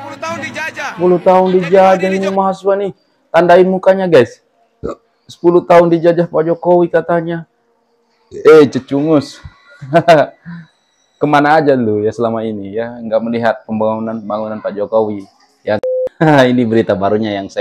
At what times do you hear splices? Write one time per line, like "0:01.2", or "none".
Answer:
0:00.9
0:15.8